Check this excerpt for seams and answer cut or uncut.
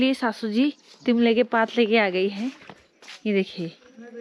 uncut